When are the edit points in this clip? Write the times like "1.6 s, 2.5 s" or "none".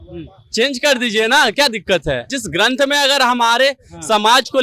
2.4 s